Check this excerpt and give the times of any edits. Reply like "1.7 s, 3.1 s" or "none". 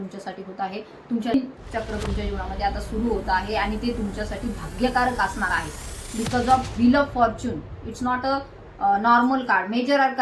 1.3 s